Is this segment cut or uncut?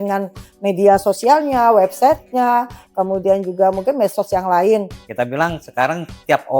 cut